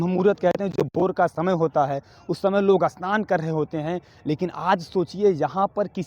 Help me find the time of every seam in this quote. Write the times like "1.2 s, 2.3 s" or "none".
none